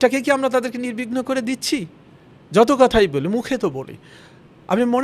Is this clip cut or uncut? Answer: uncut